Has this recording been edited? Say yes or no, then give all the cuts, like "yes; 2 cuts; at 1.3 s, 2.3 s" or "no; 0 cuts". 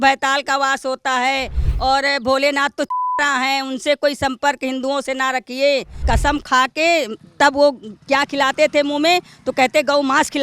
yes; 1 cut; at 5.9 s